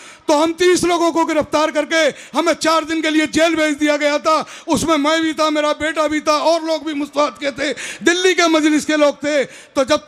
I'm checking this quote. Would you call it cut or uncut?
uncut